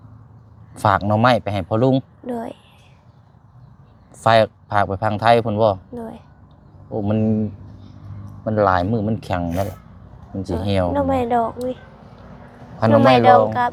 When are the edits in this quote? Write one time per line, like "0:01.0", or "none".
none